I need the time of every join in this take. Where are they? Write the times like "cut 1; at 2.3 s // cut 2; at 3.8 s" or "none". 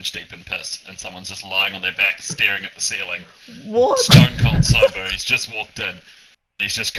none